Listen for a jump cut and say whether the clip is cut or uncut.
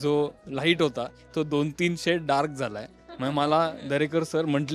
uncut